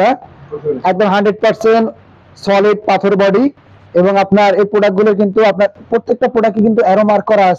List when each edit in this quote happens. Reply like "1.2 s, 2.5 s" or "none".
none